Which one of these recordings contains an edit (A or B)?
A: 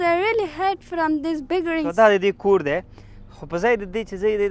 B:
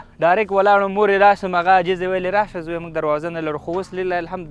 A